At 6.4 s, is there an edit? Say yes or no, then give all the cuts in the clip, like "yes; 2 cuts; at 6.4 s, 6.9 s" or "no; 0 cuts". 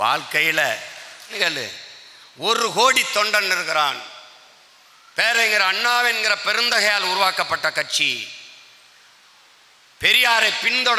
no; 1 cut; at 1.3 s